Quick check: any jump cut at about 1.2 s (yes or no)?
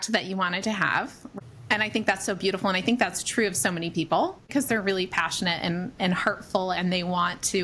yes